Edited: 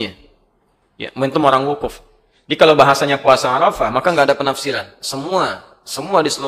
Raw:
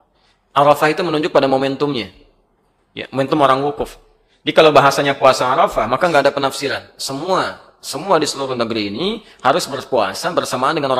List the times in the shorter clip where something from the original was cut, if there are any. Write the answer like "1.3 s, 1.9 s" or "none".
none